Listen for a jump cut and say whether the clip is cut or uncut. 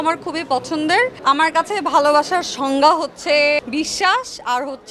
cut